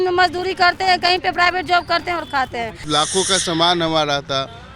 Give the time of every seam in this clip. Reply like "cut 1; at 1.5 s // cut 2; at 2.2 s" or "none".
cut 1; at 2.7 s